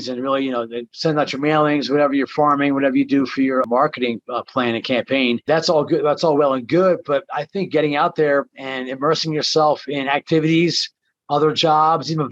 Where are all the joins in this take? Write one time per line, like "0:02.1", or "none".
0:03.7
0:05.5